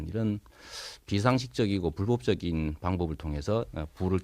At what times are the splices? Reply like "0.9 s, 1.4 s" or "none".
3.2 s

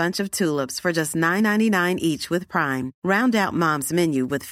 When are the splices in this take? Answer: none

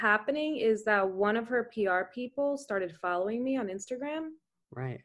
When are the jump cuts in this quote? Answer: none

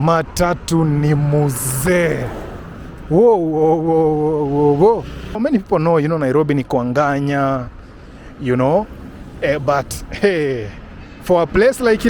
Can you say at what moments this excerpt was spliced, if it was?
5.4 s

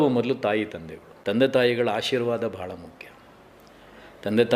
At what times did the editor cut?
none

